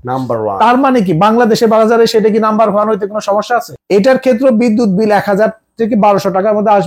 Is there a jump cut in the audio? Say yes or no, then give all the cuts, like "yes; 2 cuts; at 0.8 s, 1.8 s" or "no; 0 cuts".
yes; 1 cut; at 3.7 s